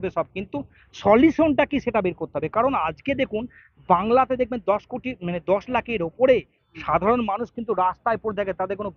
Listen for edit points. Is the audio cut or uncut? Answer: uncut